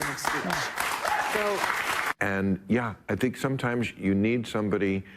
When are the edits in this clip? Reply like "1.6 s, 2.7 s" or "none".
1.8 s